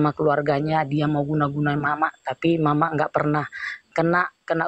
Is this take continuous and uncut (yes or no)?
yes